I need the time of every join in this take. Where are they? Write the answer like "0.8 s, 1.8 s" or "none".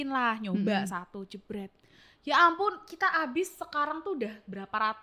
none